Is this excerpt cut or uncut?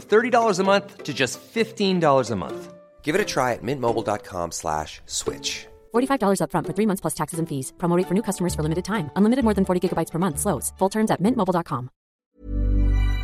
cut